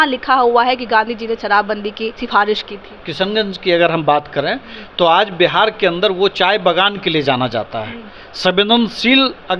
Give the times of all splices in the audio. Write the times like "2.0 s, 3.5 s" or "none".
2.2 s, 3.0 s

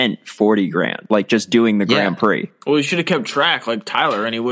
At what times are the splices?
1.0 s, 2.5 s

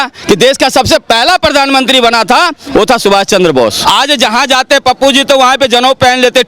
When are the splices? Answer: 3.8 s

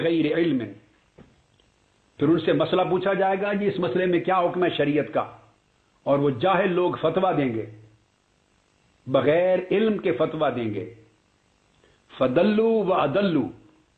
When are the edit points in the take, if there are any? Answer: 0.9 s

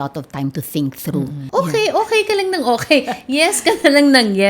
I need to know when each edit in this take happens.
1.4 s

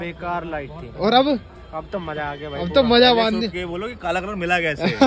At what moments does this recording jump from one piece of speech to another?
none

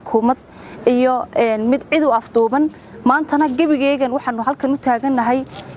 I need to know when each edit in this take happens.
none

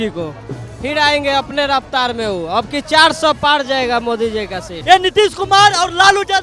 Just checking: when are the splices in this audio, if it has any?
4.7 s

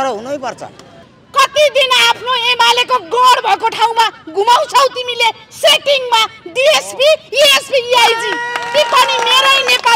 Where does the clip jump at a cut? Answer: 0.9 s

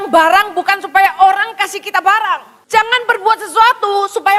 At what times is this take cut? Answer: 2.5 s

